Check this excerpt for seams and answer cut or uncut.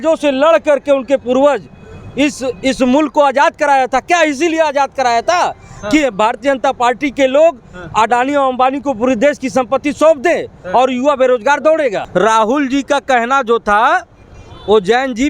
cut